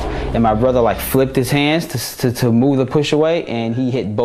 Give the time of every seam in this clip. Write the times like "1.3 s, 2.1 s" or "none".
none